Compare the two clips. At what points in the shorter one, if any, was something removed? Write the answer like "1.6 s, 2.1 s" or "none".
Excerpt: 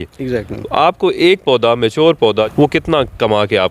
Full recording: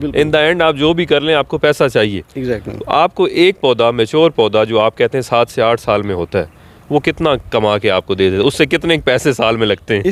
2.5 s